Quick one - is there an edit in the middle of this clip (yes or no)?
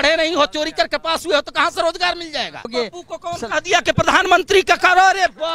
yes